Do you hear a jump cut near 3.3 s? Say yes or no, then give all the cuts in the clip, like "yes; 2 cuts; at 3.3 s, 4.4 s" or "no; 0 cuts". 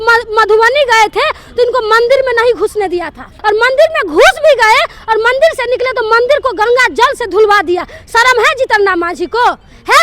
yes; 1 cut; at 3.3 s